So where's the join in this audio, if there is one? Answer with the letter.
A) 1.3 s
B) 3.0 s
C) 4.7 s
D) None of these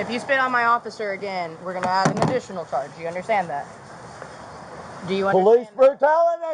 D